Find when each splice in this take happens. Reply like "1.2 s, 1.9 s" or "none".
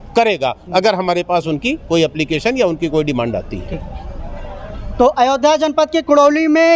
none